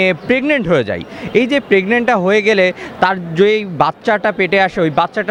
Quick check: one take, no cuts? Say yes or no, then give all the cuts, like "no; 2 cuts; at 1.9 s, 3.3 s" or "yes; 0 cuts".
yes; 0 cuts